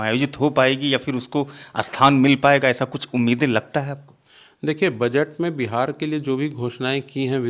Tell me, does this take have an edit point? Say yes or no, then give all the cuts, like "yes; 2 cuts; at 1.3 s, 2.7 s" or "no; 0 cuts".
no; 0 cuts